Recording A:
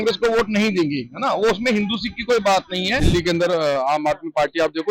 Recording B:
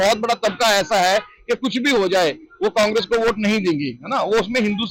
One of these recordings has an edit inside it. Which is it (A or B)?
A